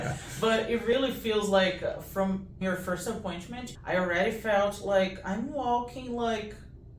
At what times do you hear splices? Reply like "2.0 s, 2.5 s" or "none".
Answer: 2.6 s, 3.7 s